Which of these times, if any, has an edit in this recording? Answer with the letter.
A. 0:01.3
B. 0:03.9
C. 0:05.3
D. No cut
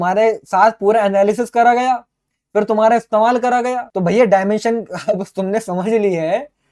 B